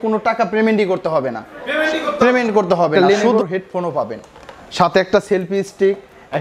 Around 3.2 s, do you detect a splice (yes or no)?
yes